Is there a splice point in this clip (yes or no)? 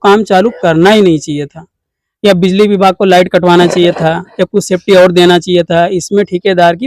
no